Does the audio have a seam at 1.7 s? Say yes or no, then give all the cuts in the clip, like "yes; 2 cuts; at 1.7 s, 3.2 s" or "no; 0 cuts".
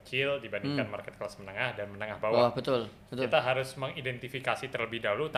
no; 0 cuts